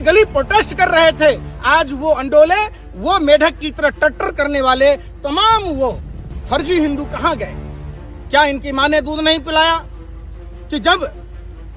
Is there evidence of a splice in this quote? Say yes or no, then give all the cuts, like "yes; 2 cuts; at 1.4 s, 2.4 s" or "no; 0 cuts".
no; 0 cuts